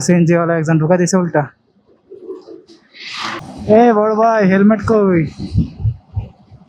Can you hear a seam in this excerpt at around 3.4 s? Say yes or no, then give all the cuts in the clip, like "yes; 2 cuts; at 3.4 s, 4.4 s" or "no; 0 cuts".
yes; 1 cut; at 3.4 s